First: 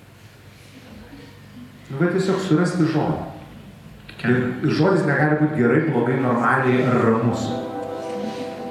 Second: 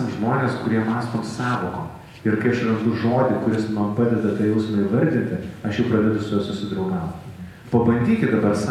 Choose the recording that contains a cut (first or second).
second